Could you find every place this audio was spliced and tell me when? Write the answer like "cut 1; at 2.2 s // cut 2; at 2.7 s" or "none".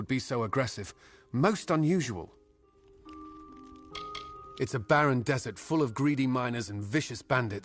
cut 1; at 2.9 s // cut 2; at 4.5 s

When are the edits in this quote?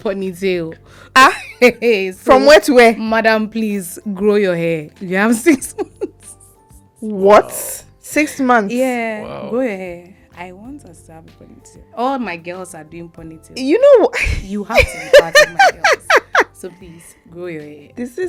none

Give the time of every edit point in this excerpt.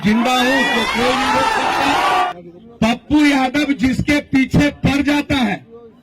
cut 1; at 2.3 s

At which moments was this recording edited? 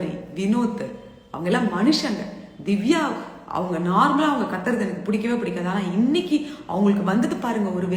none

